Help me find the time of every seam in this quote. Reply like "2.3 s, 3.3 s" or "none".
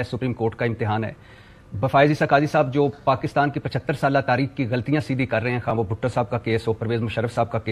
none